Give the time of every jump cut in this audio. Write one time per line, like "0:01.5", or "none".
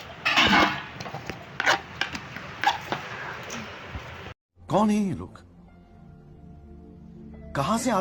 none